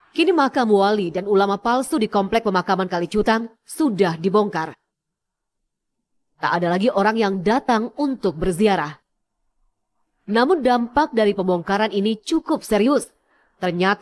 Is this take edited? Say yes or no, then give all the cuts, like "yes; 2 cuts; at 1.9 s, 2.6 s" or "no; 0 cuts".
no; 0 cuts